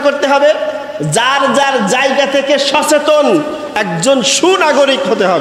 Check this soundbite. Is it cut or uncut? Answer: uncut